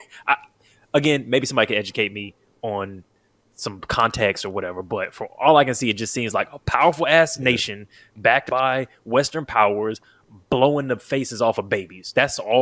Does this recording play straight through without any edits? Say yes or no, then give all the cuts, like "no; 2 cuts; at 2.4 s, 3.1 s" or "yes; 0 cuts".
yes; 0 cuts